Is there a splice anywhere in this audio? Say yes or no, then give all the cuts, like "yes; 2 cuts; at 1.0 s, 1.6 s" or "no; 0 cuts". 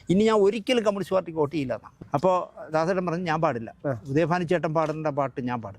yes; 1 cut; at 1.9 s